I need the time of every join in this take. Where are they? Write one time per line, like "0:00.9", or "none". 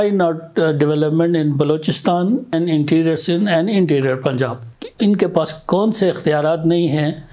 0:02.5
0:04.6